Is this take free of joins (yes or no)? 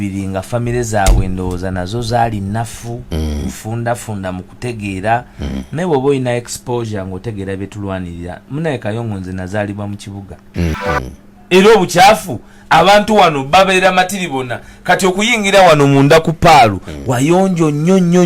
no